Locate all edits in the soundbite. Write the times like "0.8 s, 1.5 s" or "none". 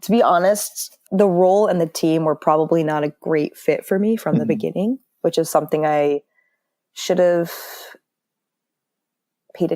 1.0 s